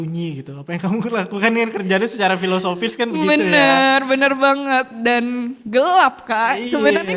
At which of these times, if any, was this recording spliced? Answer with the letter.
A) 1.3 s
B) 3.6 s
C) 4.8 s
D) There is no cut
D